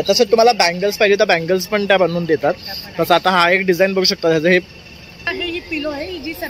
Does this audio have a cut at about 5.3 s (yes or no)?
yes